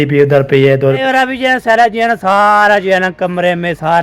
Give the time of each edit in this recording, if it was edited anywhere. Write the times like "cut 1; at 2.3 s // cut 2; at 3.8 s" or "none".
cut 1; at 1.0 s